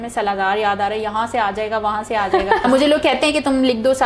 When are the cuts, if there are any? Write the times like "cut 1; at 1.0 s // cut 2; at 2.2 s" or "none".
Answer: cut 1; at 2.6 s

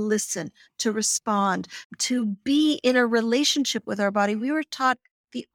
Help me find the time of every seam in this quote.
cut 1; at 1.8 s

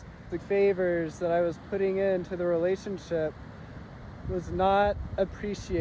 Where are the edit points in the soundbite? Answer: none

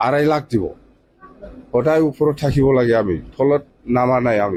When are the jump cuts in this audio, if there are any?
none

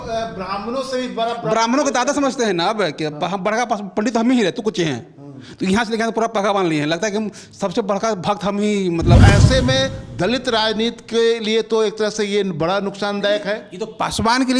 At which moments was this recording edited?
cut 1; at 9.2 s

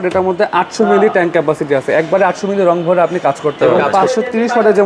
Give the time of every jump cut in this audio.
cut 1; at 3.6 s

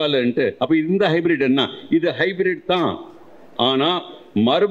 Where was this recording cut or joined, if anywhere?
none

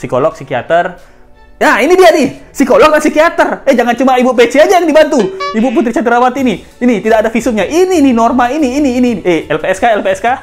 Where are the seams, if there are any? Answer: none

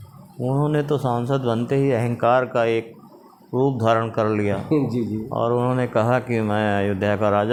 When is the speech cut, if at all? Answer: none

